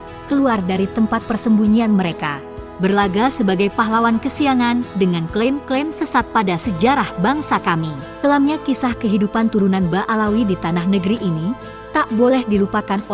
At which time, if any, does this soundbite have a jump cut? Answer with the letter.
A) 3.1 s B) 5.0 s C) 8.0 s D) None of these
C